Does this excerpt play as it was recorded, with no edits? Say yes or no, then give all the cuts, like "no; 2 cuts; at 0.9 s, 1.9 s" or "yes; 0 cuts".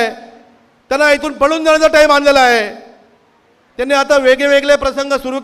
yes; 0 cuts